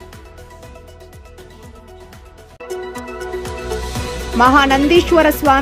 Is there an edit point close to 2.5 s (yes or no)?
yes